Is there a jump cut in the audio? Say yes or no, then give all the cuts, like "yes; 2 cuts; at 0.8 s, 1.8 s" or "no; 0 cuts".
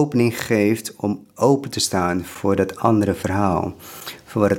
yes; 1 cut; at 1.2 s